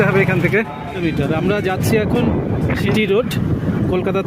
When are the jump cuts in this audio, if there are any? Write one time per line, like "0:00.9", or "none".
0:01.0
0:02.9